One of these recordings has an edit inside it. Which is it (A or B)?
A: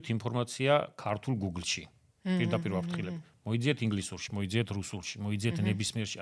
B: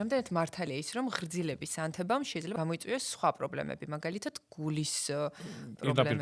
B